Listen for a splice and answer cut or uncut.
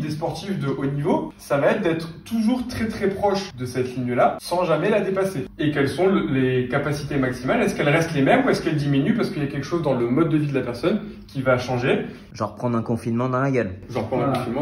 cut